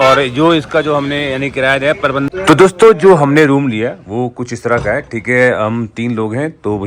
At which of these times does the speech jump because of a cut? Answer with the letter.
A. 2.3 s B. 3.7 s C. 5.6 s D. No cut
A